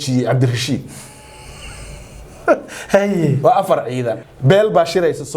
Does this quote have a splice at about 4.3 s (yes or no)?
yes